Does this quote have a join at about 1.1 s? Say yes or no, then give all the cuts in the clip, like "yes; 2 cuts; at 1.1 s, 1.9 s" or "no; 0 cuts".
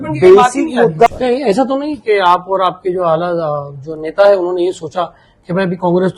yes; 1 cut; at 1.1 s